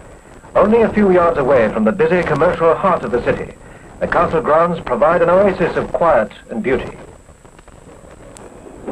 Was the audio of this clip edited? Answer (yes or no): yes